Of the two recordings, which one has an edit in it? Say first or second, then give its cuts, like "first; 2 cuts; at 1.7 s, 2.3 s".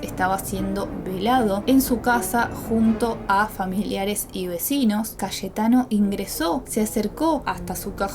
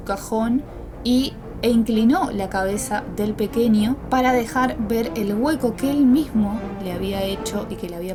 first; 3 cuts; at 1.6 s, 5.1 s, 6.7 s